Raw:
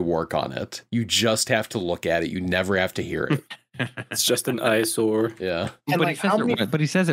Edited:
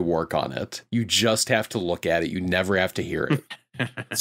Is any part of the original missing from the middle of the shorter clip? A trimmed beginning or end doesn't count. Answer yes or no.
no